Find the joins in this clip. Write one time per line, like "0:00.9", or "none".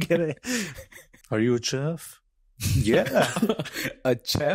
0:01.1